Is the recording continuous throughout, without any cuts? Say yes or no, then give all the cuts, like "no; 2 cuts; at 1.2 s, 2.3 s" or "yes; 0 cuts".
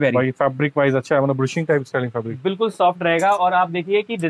yes; 0 cuts